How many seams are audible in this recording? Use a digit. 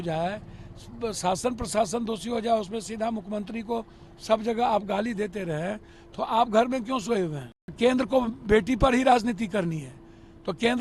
1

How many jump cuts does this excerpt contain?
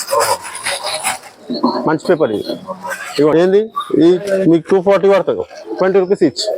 1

